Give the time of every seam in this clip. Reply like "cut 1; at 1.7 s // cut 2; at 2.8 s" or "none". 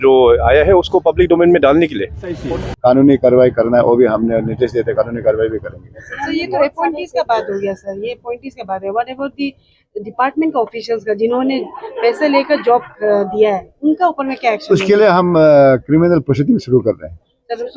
cut 1; at 2.3 s